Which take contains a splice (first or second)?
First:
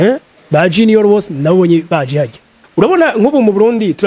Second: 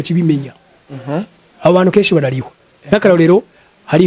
first